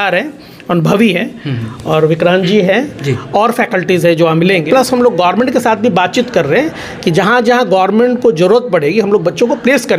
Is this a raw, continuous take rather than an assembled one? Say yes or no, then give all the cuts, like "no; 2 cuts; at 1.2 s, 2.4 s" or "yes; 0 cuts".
no; 1 cut; at 4.6 s